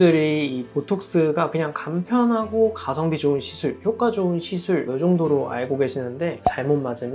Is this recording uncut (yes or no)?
yes